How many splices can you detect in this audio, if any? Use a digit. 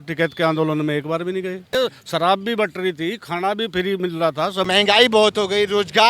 2